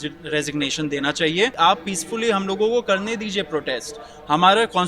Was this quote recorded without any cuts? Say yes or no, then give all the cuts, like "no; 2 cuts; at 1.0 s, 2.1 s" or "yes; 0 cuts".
no; 1 cut; at 1.5 s